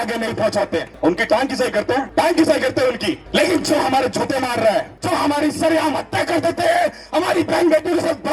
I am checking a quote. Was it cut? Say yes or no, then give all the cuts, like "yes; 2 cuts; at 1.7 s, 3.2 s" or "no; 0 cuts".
yes; 4 cuts; at 0.9 s, 2.1 s, 3.2 s, 4.9 s